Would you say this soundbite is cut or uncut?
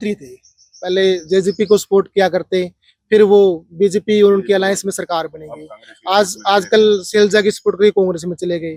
uncut